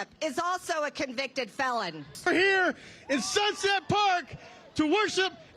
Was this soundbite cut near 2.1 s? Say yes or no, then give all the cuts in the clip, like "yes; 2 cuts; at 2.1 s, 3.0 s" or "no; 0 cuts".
yes; 1 cut; at 2.1 s